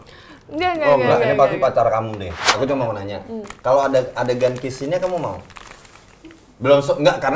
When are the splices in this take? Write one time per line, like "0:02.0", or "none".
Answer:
0:02.5